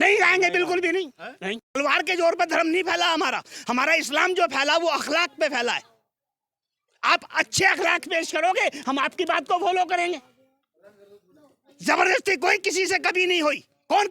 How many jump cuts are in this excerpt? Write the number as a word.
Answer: one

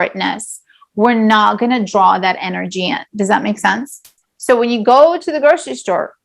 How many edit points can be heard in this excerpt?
one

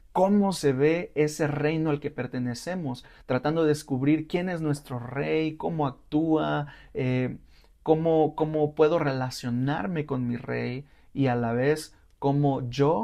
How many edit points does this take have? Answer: zero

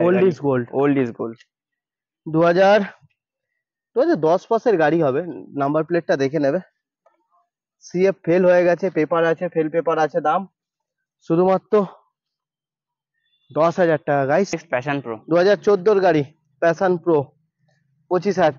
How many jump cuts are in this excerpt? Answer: one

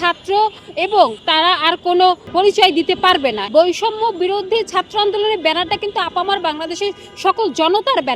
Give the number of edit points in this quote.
three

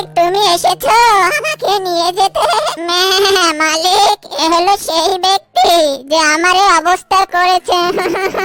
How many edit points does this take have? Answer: one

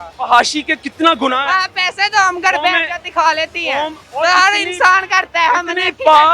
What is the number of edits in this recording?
one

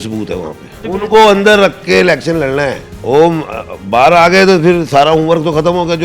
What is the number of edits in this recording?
two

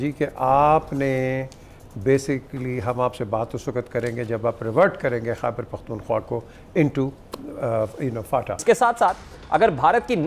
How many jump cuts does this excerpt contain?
one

